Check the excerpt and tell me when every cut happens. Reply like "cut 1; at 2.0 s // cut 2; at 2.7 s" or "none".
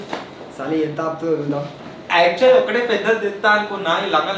cut 1; at 1.8 s